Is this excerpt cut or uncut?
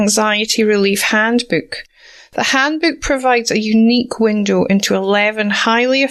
uncut